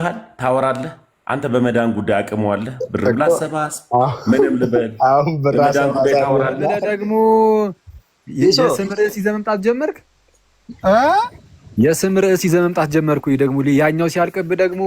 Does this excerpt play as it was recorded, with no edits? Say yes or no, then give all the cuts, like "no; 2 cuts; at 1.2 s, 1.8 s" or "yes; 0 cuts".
no; 1 cut; at 6.9 s